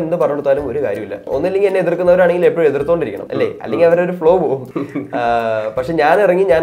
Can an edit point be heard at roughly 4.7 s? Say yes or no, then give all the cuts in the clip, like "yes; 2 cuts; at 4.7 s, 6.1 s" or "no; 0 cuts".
yes; 3 cuts; at 1.3 s, 3.2 s, 4.7 s